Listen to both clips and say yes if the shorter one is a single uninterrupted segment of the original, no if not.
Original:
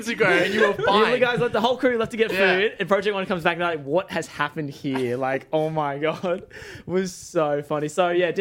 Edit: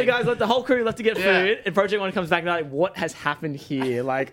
yes